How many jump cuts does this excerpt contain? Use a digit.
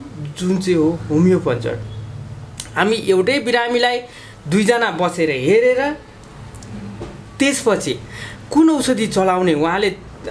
0